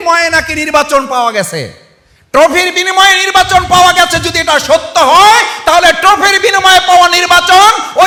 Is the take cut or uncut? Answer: uncut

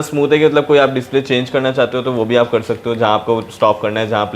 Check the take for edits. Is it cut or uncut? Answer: uncut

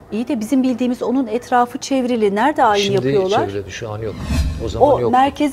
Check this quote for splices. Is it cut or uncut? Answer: uncut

